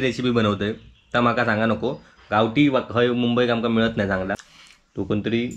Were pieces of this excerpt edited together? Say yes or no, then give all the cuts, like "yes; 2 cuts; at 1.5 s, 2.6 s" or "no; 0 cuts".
yes; 1 cut; at 4.5 s